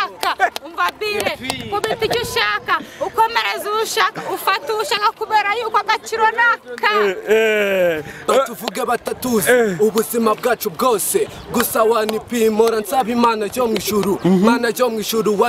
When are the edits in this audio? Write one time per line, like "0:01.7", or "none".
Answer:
none